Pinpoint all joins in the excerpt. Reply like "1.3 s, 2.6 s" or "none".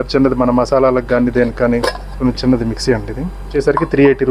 2.2 s, 3.5 s